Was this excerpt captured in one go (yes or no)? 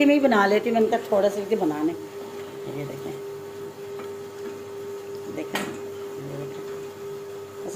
yes